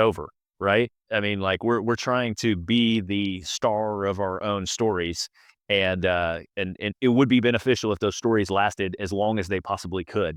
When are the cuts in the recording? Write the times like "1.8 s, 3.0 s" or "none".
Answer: none